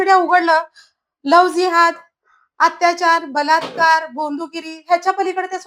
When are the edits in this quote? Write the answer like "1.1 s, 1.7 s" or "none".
none

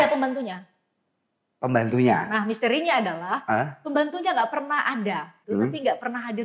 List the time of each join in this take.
5.4 s

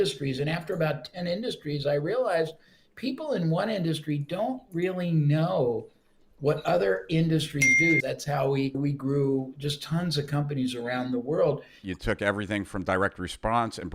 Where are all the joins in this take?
8.0 s, 11.8 s

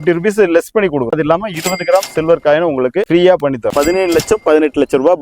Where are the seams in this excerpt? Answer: 1.2 s, 3.7 s

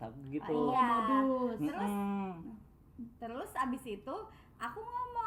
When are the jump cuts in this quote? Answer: none

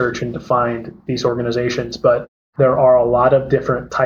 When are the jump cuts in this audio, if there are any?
2.4 s

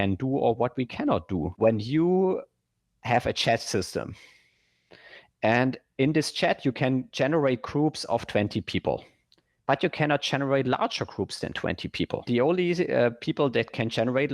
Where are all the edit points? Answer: 1.5 s, 12.3 s

